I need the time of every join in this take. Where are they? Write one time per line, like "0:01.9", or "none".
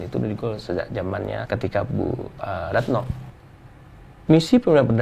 0:01.4
0:03.2